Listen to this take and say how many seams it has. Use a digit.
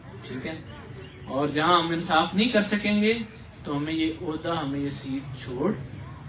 0